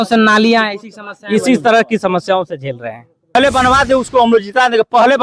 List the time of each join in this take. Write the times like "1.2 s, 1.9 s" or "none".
3.3 s